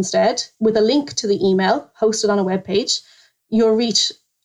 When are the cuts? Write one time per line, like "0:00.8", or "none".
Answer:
0:03.2